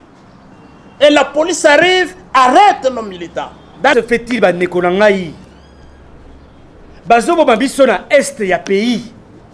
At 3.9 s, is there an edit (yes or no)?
yes